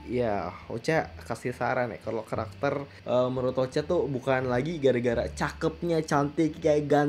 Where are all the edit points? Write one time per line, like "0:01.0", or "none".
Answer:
0:02.9